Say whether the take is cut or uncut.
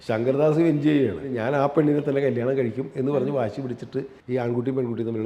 cut